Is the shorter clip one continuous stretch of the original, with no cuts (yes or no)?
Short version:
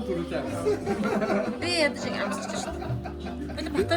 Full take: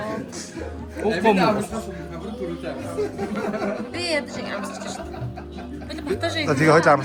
yes